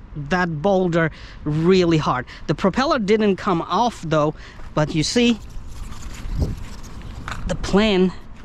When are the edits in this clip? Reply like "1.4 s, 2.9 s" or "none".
none